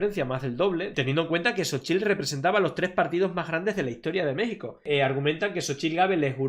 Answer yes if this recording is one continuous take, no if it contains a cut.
no